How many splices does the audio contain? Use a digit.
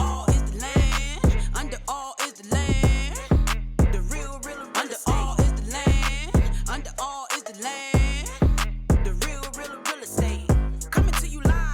1